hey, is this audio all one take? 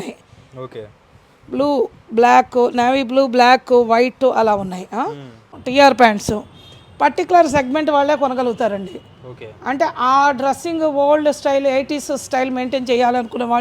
no; 1 cut; at 5.5 s

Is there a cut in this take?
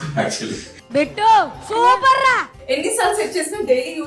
yes; 1 cut; at 2.5 s

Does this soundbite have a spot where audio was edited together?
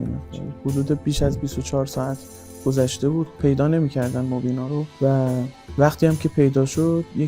yes; 2 cuts; at 4.9 s, 5.8 s

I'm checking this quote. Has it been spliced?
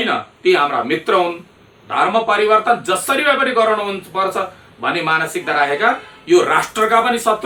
no; 0 cuts

